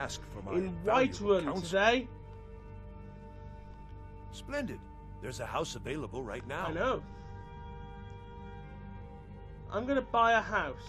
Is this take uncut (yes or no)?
no